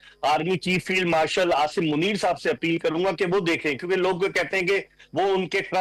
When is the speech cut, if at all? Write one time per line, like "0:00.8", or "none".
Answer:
none